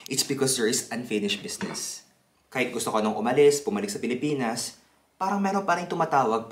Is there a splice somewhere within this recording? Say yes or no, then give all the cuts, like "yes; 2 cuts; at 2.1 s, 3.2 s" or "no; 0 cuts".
yes; 1 cut; at 2.3 s